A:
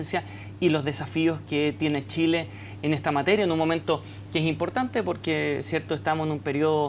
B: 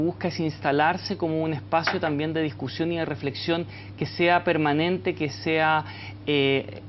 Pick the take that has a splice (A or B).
B